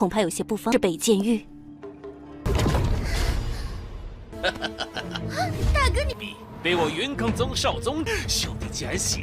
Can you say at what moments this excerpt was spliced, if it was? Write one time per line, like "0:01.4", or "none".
0:02.4